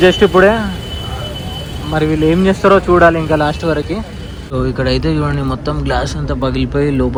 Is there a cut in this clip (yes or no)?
no